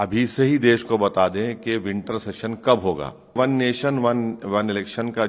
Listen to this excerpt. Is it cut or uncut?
cut